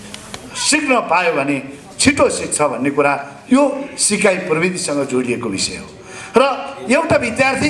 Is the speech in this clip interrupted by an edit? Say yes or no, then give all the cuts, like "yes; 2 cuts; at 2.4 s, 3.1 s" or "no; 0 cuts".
no; 0 cuts